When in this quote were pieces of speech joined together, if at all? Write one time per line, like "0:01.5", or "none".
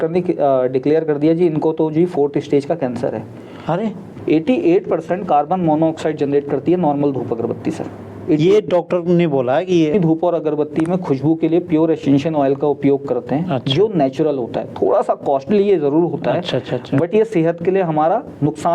0:04.0
0:09.9